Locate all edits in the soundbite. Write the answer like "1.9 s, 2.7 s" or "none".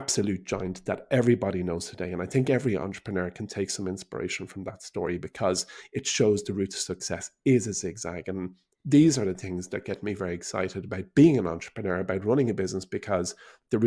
none